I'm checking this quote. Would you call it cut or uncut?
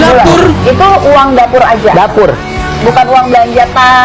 uncut